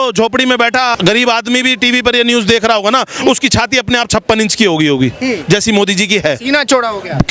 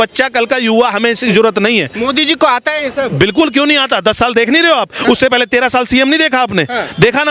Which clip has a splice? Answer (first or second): first